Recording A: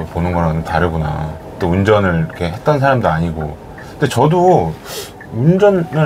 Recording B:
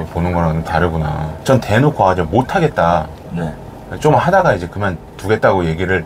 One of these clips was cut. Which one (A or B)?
B